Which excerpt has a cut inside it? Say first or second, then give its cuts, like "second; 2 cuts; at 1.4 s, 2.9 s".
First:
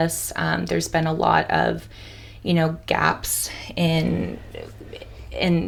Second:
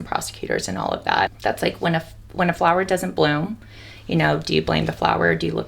second; 1 cut; at 1.3 s